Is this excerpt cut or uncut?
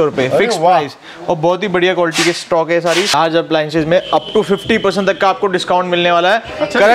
cut